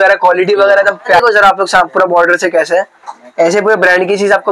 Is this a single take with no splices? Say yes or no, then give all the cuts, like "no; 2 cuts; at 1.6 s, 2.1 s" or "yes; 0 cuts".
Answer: no; 1 cut; at 1.2 s